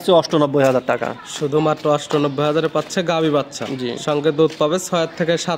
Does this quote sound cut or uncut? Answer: uncut